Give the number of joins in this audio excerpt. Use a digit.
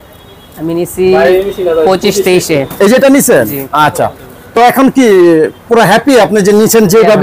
0